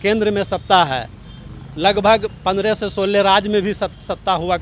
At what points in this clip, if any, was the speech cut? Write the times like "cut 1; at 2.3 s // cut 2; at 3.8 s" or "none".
none